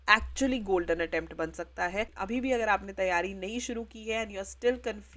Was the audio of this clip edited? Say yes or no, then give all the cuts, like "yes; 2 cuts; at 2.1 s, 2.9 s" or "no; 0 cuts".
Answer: yes; 1 cut; at 2.2 s